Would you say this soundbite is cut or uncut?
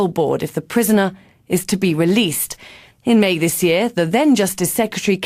uncut